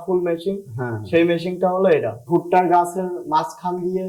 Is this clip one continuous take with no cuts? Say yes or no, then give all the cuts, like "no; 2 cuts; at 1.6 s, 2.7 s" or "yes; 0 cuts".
no; 1 cut; at 2.2 s